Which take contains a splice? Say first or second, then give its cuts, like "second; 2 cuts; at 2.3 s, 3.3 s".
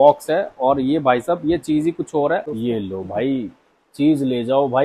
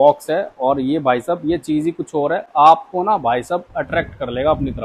first; 1 cut; at 2.5 s